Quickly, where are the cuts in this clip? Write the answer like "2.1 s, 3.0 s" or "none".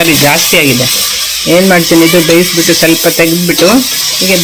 none